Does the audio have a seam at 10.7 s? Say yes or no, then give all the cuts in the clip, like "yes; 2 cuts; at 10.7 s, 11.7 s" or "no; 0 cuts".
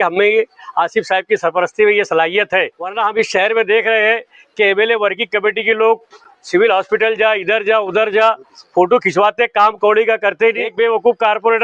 yes; 2 cuts; at 2.8 s, 10.7 s